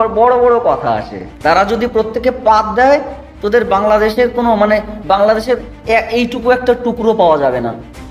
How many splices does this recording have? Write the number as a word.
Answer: one